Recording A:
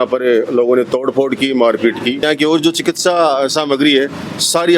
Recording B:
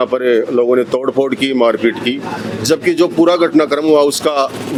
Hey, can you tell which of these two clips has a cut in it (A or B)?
A